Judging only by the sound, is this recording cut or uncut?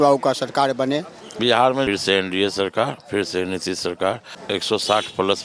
cut